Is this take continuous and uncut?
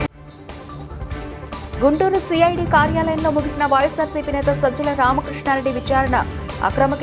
no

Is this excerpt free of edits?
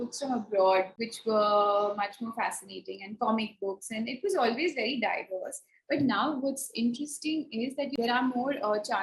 no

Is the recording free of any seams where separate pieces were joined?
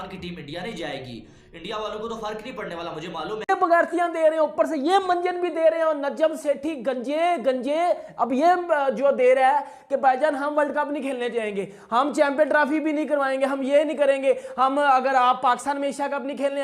no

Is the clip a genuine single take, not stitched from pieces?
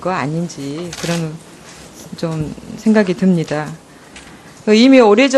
yes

